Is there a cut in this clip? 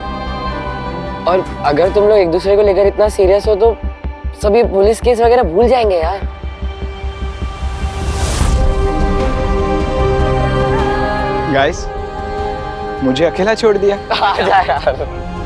no; 0 cuts

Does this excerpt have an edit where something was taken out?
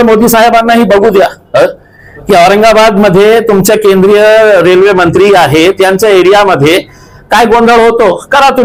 no; 0 cuts

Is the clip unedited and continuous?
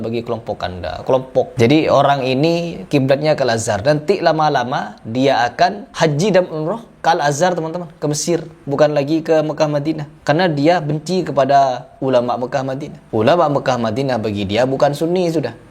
no; 2 cuts; at 1.5 s, 5.8 s

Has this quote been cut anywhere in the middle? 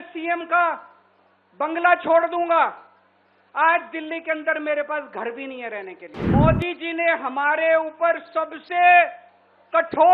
yes; 1 cut; at 6.1 s

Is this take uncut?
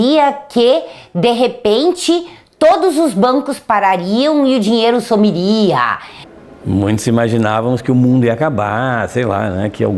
no; 1 cut; at 6.1 s

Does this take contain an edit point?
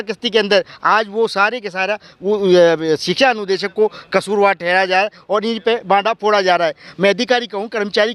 yes; 1 cut; at 6.9 s

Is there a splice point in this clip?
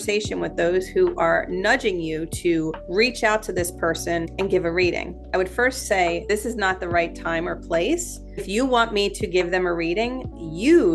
yes; 4 cuts; at 2.8 s, 4.3 s, 6.2 s, 8.5 s

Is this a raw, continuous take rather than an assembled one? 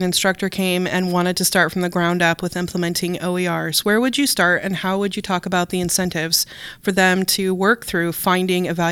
yes; 0 cuts

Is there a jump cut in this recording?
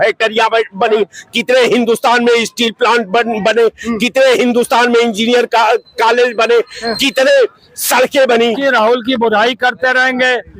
yes; 1 cut; at 8.5 s

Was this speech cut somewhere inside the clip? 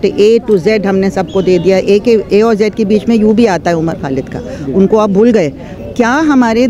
yes; 1 cut; at 5.8 s

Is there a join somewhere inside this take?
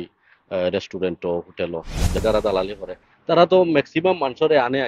yes; 1 cut; at 2.2 s

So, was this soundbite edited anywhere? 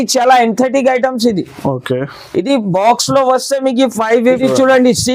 yes; 1 cut; at 4.2 s

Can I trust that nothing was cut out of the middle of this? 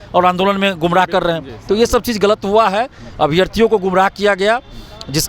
yes; 0 cuts

